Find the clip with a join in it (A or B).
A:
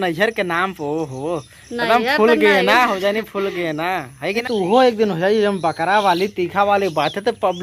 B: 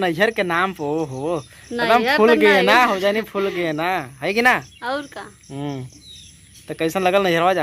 A